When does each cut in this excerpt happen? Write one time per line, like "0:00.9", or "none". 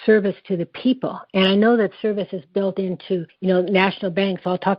0:03.3